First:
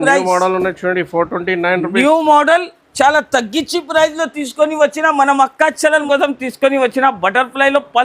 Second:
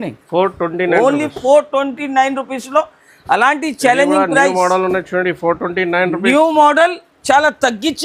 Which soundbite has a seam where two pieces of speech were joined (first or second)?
first